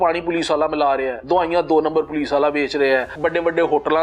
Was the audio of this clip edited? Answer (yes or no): yes